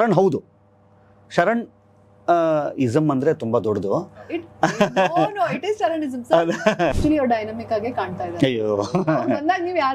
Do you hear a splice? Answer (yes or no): yes